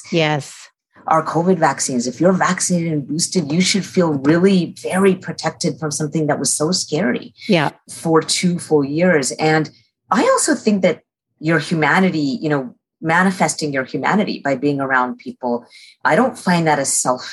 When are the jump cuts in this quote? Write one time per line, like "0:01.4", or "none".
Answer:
0:07.8